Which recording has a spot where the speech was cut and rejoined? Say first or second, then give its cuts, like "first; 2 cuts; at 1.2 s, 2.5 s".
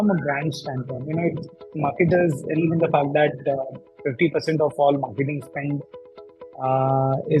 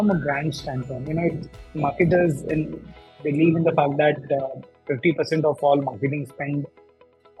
first; 1 cut; at 2.6 s